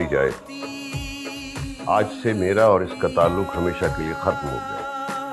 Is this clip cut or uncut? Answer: cut